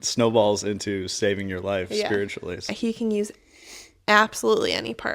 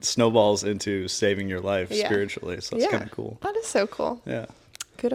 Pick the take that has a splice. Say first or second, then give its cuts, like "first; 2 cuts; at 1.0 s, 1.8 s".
first; 1 cut; at 2.7 s